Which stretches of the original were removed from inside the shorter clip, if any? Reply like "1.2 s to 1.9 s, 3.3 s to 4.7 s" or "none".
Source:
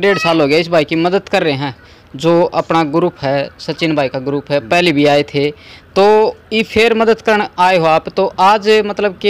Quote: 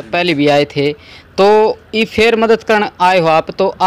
none